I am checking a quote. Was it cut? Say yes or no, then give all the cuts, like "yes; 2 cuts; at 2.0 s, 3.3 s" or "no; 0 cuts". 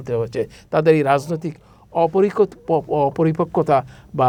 no; 0 cuts